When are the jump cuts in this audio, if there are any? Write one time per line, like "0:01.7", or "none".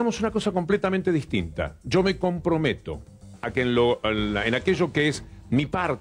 none